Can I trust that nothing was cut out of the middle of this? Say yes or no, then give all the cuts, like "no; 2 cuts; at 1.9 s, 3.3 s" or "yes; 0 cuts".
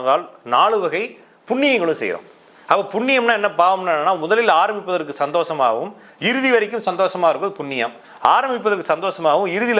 yes; 0 cuts